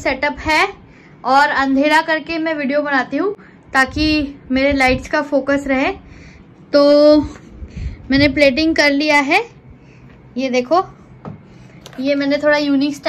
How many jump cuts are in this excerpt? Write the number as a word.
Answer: zero